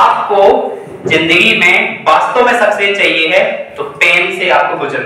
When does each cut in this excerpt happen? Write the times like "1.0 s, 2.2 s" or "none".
none